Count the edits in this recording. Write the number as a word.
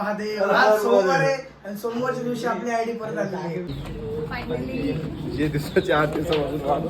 one